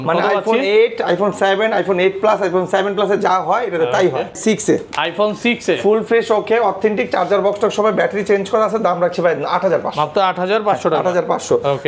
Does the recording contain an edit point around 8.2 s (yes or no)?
no